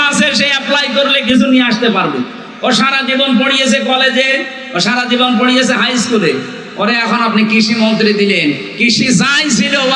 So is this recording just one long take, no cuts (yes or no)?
yes